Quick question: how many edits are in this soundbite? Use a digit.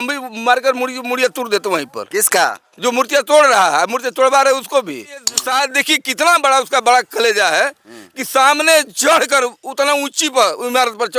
1